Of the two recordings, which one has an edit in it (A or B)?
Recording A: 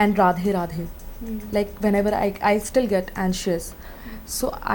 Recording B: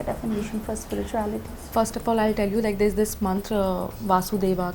B